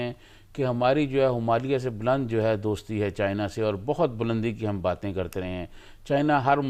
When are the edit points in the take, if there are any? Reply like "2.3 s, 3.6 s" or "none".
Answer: none